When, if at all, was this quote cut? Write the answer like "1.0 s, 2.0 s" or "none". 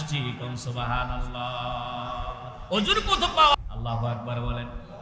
3.5 s